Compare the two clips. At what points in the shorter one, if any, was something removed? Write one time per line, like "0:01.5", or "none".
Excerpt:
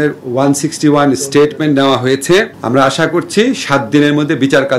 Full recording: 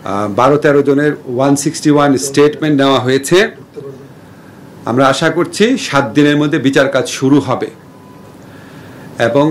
0:02.6